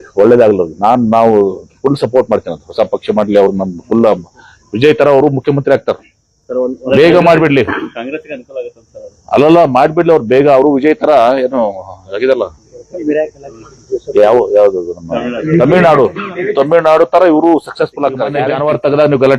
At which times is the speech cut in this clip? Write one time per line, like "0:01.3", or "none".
0:18.4